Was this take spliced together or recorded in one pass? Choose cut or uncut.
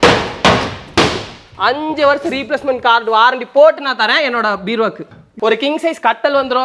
cut